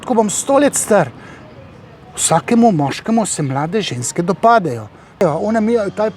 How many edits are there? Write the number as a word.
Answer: one